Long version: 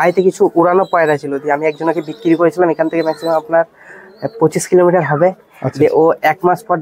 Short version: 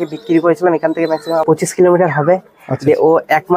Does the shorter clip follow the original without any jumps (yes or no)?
no